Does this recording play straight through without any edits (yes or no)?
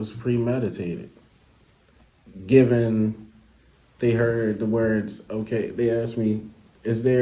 yes